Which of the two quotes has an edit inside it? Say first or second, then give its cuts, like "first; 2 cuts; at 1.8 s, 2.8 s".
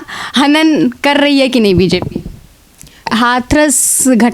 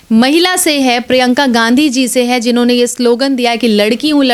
first; 1 cut; at 3.0 s